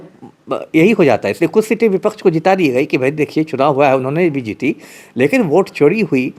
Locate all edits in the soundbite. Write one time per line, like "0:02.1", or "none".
none